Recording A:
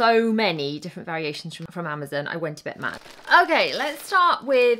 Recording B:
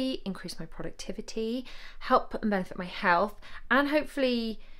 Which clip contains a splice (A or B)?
A